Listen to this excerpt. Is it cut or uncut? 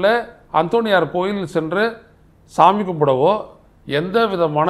uncut